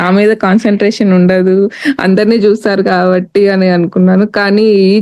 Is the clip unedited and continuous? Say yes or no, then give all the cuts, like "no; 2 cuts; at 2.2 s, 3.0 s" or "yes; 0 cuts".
yes; 0 cuts